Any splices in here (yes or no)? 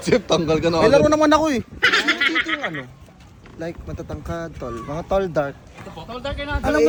no